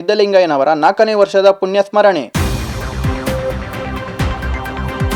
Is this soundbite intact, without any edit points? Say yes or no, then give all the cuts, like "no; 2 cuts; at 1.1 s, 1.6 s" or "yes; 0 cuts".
yes; 0 cuts